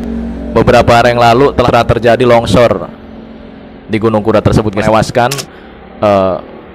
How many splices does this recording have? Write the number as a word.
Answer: two